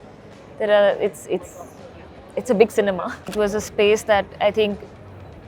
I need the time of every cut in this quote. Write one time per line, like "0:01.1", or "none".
0:03.3